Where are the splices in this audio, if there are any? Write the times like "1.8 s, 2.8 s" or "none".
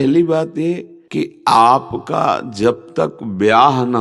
0.9 s